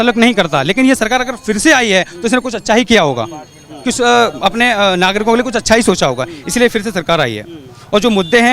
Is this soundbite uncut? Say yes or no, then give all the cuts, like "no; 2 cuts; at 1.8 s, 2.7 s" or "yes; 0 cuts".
yes; 0 cuts